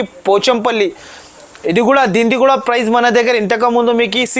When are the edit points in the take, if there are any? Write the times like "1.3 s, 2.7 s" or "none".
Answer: none